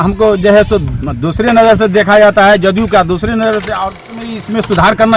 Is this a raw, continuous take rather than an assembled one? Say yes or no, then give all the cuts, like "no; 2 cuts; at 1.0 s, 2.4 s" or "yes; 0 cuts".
no; 1 cut; at 4.3 s